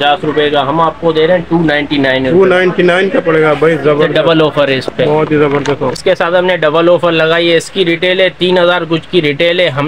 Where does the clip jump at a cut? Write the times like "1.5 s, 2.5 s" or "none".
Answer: 6.0 s